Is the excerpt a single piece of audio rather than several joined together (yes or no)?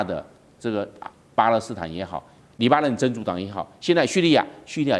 no